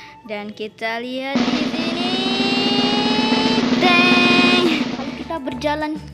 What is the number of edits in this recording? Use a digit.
1